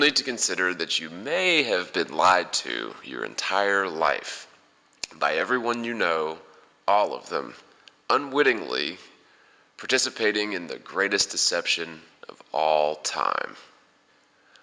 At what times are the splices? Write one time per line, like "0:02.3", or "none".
0:09.3